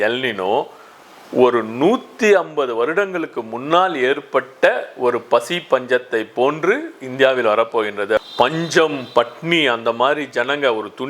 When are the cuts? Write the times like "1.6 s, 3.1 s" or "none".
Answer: 8.2 s